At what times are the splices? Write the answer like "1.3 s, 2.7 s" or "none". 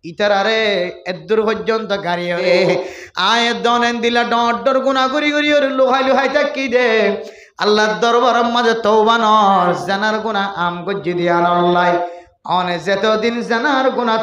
2.4 s